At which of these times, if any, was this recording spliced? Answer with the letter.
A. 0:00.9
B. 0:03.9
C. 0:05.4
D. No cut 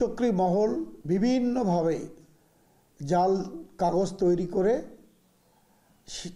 A